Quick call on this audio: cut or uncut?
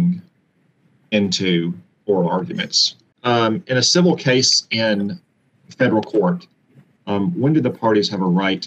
cut